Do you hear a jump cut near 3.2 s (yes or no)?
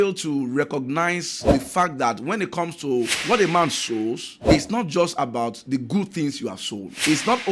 yes